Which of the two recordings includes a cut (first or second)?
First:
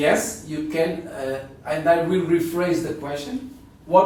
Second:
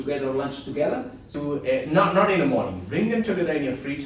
second